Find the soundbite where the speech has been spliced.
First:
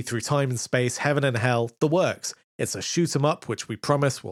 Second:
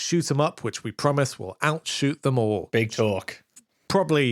second; 1 cut; at 2.7 s

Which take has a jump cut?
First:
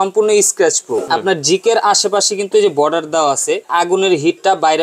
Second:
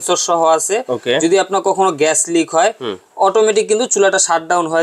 first; 2 cuts; at 1.0 s, 3.7 s

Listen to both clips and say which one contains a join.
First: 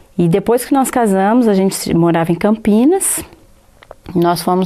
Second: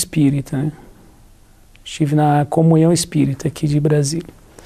first; 1 cut; at 3.2 s

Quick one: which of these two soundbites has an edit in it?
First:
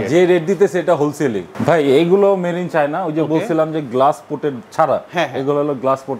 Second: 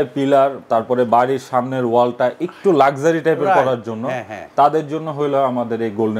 first; 1 cut; at 1.5 s

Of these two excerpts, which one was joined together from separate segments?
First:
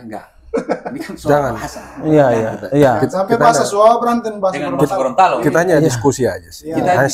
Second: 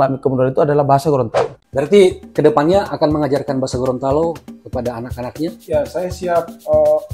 second; 1 cut; at 1.6 s

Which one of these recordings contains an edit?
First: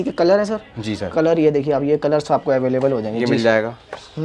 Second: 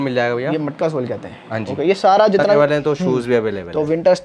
second; 1 cut; at 2.6 s

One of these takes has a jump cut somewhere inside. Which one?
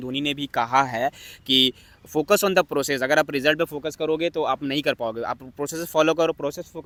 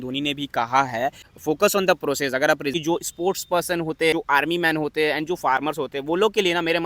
second; 3 cuts; at 1.3 s, 2.7 s, 4.1 s

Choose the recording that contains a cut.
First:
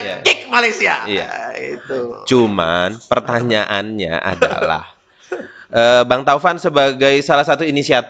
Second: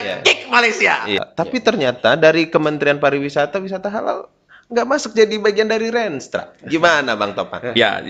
second; 1 cut; at 1.2 s

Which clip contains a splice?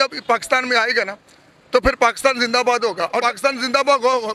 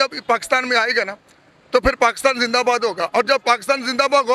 first; 1 cut; at 3.1 s

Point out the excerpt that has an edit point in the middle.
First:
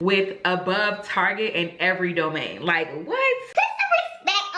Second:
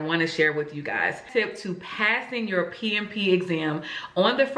second; 1 cut; at 1.2 s

